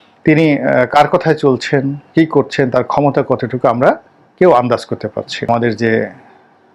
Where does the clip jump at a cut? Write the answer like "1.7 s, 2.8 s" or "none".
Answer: 5.5 s